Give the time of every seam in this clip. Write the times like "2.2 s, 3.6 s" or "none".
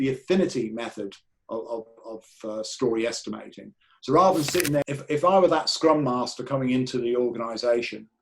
4.8 s